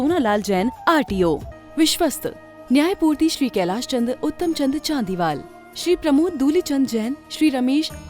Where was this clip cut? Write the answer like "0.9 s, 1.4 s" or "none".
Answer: 1.5 s